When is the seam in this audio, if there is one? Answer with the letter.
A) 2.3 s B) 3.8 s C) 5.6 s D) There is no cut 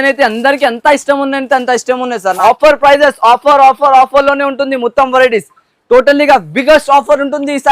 A